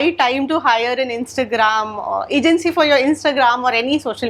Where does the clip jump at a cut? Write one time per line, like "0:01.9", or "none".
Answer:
none